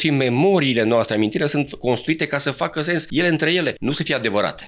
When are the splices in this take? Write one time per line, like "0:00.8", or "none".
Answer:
0:03.1
0:03.8